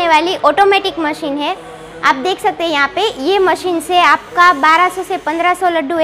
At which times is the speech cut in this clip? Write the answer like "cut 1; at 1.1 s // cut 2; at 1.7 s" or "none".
none